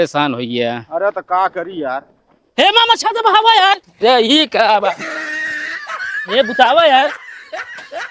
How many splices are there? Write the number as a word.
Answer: one